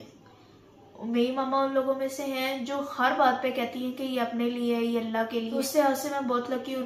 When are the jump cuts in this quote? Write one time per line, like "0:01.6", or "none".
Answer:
0:05.5